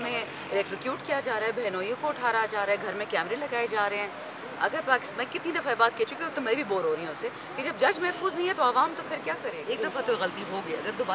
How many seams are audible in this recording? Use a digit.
1